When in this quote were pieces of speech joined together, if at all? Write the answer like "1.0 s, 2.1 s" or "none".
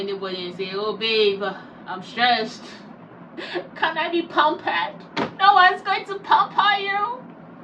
none